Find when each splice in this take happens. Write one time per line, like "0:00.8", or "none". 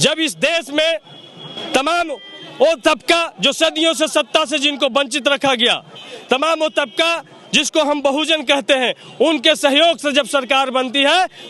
none